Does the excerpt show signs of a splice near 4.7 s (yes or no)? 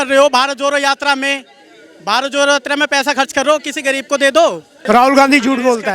yes